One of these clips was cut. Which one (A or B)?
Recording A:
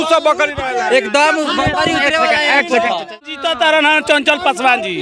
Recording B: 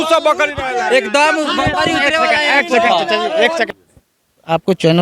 A